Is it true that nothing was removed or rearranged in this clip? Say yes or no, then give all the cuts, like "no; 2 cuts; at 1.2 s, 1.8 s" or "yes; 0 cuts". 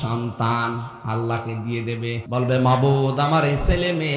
no; 1 cut; at 2.2 s